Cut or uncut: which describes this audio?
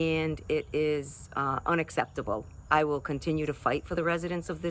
cut